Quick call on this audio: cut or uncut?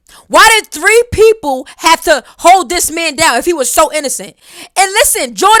uncut